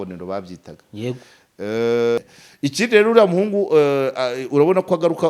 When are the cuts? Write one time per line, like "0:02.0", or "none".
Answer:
0:02.4